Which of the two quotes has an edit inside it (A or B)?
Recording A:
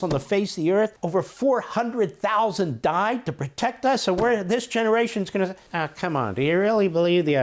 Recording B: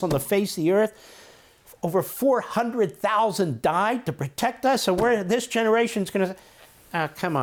A